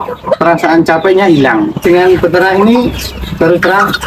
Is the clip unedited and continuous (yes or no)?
no